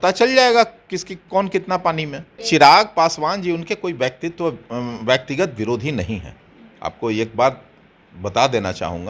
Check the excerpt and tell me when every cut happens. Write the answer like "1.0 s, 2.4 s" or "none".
2.4 s